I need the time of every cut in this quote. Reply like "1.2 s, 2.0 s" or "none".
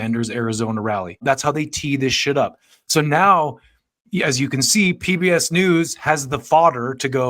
1.2 s